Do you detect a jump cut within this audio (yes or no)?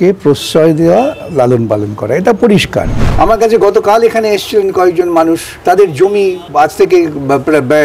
yes